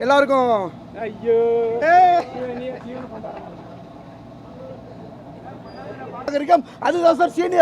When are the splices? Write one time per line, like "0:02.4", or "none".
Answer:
0:06.3